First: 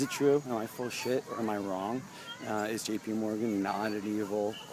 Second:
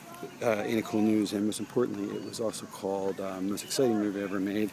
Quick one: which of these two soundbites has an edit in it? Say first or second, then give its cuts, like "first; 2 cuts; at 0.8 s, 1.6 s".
second; 1 cut; at 1.2 s